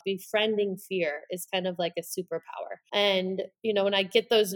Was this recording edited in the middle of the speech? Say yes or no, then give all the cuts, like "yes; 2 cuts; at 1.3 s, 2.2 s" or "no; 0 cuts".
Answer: yes; 1 cut; at 2.8 s